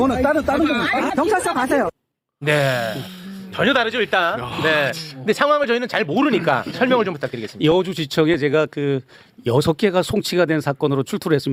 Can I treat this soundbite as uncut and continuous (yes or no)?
yes